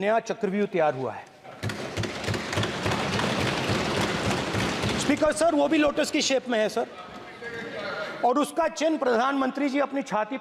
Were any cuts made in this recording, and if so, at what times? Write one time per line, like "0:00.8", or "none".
none